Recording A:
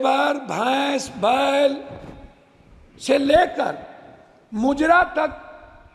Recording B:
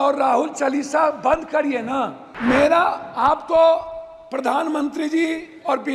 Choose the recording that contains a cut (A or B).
B